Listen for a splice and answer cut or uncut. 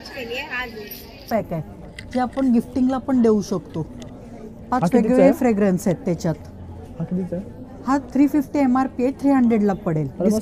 cut